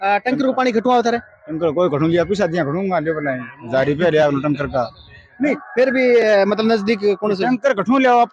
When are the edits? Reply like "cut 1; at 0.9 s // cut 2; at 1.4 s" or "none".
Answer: none